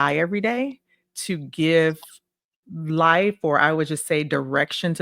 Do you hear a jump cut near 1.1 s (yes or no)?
no